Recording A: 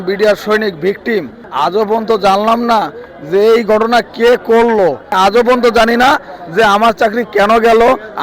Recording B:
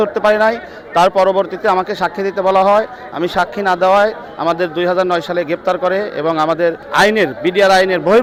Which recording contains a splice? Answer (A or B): A